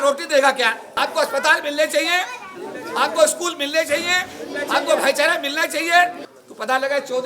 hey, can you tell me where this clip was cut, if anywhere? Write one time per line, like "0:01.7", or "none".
0:00.9
0:06.3